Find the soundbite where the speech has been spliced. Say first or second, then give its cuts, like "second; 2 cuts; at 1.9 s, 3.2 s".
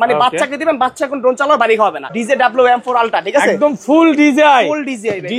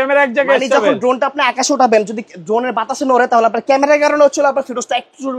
first; 1 cut; at 2.1 s